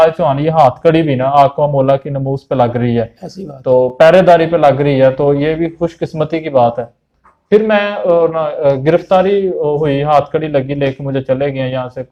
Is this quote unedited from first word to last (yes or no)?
yes